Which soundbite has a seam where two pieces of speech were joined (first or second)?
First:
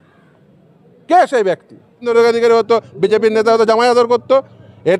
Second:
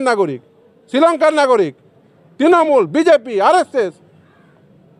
first